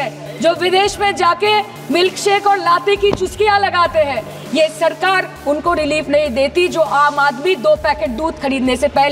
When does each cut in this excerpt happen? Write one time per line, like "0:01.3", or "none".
none